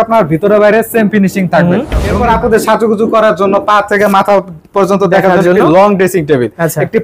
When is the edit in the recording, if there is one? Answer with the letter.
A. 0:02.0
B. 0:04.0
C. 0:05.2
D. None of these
A